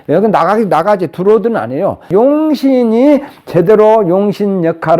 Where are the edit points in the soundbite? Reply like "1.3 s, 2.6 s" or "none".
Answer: 2.0 s

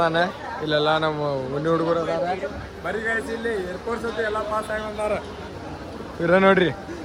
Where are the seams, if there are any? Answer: none

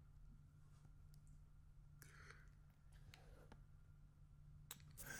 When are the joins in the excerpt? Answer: none

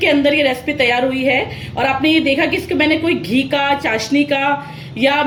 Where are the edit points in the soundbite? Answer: none

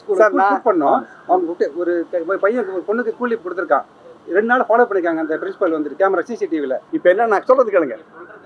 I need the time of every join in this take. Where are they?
6.9 s

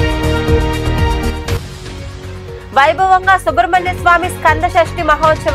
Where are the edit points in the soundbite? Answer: 0.8 s, 1.6 s, 2.6 s

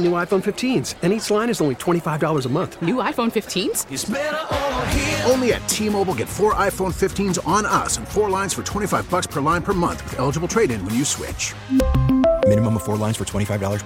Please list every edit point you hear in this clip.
none

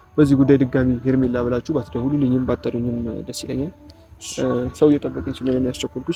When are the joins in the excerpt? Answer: none

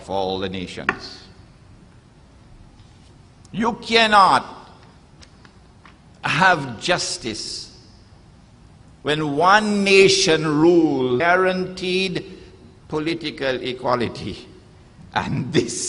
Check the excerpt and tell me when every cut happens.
none

